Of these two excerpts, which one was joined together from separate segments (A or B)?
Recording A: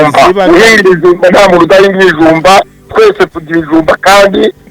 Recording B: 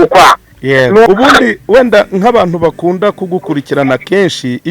B